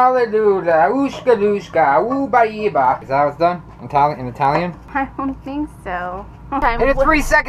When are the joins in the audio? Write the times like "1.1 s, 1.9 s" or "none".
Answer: 3.0 s, 4.8 s, 6.6 s